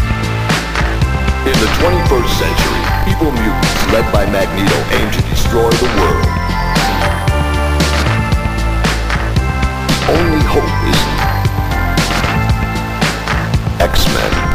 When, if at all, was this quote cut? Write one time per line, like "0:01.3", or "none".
none